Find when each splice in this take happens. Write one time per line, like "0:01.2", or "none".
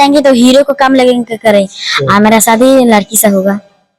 none